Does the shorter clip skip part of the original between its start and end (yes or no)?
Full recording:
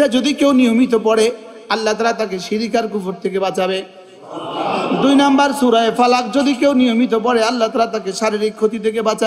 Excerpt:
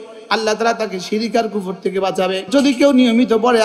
yes